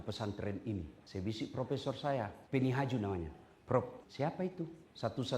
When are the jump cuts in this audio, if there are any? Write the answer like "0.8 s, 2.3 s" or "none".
1.0 s, 2.4 s, 4.5 s